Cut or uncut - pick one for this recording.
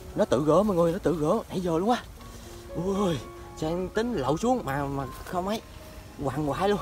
uncut